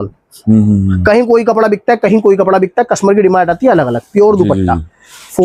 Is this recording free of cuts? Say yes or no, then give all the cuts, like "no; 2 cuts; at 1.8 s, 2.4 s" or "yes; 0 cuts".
yes; 0 cuts